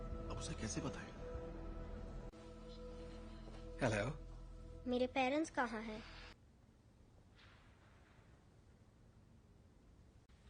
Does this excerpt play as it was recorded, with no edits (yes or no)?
no